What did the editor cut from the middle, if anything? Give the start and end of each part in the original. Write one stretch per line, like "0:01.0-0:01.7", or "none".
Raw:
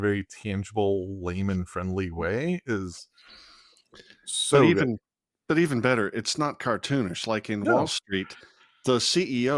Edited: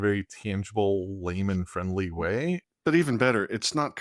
0:02.6-0:05.3